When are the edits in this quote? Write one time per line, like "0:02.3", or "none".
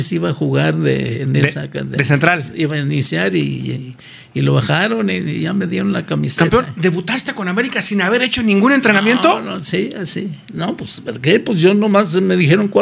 none